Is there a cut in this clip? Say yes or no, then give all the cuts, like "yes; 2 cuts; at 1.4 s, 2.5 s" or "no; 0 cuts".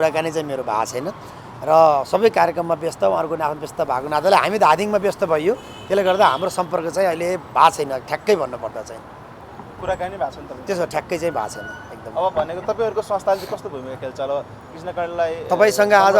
no; 0 cuts